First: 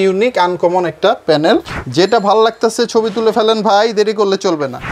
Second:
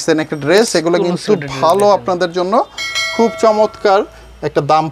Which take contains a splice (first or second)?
first